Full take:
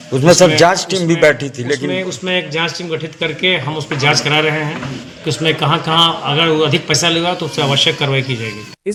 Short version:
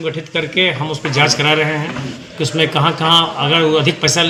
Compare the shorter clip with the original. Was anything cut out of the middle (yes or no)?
no